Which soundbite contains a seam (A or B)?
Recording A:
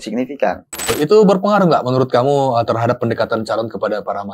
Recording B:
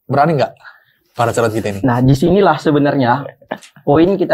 A